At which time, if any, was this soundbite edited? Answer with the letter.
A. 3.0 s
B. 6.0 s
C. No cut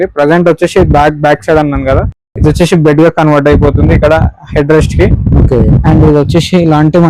C